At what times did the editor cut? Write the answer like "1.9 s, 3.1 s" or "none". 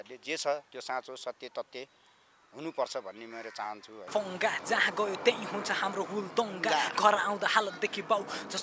4.1 s